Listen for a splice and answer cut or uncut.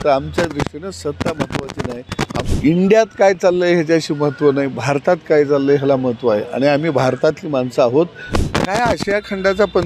cut